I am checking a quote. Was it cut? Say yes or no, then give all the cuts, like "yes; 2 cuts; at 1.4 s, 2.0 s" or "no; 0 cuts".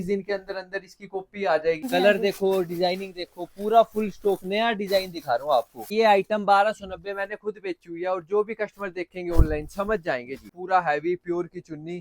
yes; 3 cuts; at 1.9 s, 5.9 s, 10.5 s